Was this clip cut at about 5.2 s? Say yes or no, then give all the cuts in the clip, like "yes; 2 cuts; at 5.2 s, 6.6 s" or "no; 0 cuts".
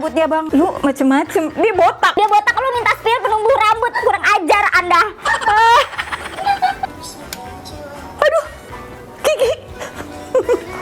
no; 0 cuts